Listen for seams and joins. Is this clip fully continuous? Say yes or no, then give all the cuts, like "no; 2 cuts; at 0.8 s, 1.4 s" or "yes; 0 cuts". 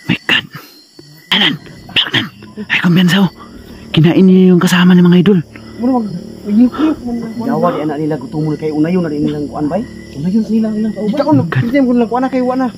no; 1 cut; at 1.3 s